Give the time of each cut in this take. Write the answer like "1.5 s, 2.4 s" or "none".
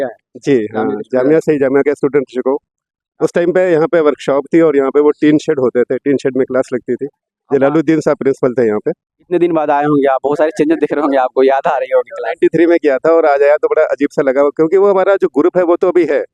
none